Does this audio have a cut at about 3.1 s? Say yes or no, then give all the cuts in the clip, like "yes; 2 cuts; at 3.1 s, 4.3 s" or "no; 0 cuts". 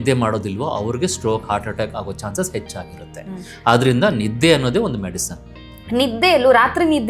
no; 0 cuts